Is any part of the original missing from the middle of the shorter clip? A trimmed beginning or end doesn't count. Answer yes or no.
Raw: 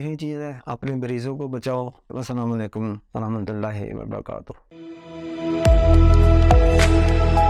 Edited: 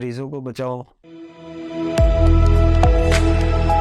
yes